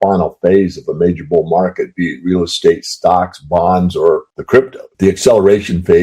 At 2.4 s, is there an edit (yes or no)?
no